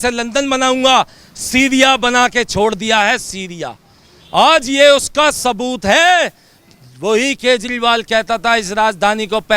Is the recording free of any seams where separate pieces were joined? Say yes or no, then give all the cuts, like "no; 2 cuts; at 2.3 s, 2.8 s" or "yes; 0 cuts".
yes; 0 cuts